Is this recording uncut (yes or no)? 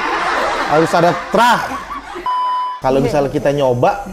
no